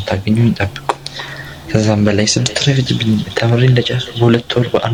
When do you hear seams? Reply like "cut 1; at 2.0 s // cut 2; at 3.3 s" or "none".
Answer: none